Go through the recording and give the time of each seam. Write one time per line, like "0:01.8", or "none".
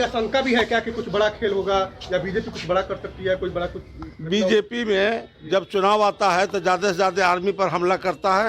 0:05.7